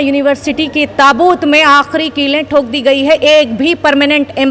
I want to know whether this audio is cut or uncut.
uncut